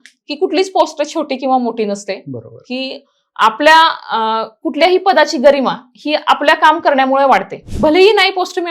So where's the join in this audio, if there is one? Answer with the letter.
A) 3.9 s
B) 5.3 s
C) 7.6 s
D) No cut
C